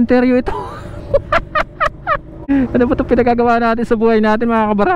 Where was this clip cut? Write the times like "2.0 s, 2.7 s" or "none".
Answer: 2.2 s